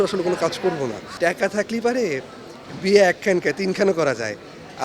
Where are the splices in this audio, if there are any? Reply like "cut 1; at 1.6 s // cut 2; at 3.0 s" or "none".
cut 1; at 1.0 s